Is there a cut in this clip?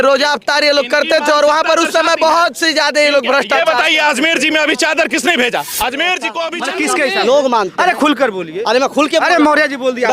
yes; 1 cut; at 6.4 s

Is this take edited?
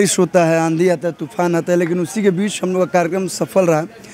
no; 0 cuts

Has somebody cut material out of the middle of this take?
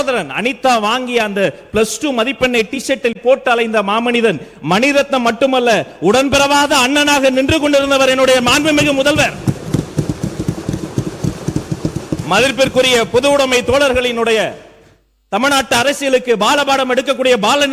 no; 0 cuts

